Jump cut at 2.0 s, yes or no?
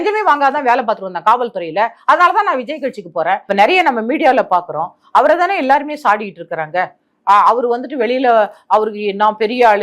no